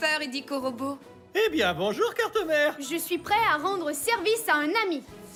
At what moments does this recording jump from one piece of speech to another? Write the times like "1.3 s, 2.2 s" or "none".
none